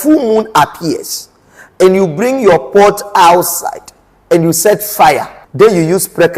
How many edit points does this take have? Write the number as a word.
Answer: one